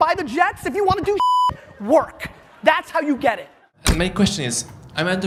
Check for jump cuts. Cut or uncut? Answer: uncut